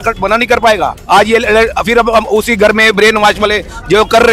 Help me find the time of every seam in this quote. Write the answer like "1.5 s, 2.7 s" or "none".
1.0 s